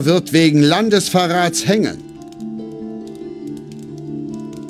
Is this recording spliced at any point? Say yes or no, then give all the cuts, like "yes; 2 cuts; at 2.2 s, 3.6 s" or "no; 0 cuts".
yes; 1 cut; at 2.0 s